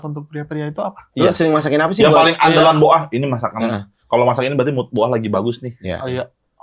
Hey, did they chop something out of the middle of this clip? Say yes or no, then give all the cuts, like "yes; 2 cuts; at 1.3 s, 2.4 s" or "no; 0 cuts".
no; 0 cuts